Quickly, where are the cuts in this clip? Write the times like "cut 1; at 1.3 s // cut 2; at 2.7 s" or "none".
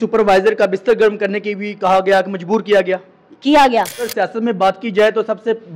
cut 1; at 4.1 s